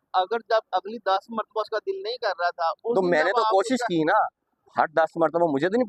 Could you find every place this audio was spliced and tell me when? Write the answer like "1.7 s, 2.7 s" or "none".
none